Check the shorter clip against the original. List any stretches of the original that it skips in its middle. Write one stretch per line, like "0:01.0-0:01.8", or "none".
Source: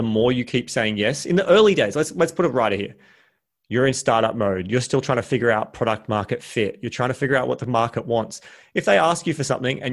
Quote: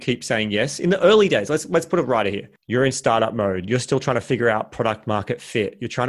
0:03.0-0:03.5